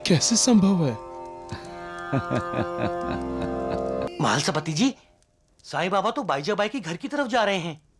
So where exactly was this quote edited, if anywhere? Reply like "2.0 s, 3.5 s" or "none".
4.1 s